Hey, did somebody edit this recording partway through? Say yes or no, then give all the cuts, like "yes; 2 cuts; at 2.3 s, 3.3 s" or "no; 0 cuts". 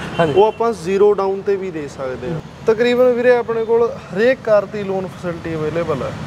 yes; 1 cut; at 2.3 s